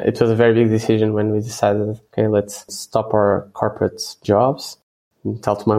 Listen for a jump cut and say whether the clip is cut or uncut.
uncut